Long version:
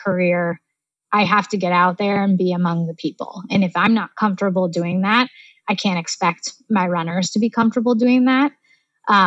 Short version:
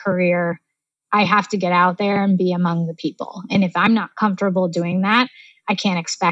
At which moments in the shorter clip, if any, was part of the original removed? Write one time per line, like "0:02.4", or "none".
none